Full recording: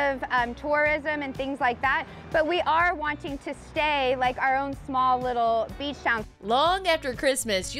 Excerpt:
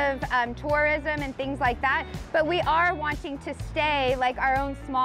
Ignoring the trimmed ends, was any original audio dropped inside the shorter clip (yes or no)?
no